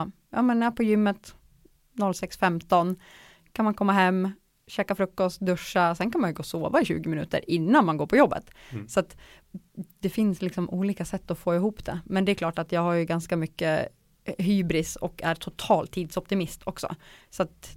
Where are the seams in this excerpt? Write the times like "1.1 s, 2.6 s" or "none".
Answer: none